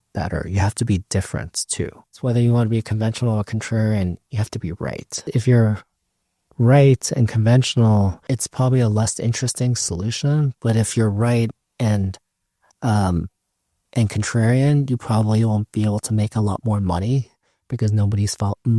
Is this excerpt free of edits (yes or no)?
no